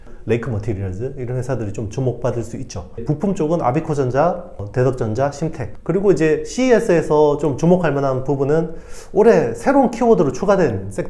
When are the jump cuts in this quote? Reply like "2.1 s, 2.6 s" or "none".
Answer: 3.0 s, 5.7 s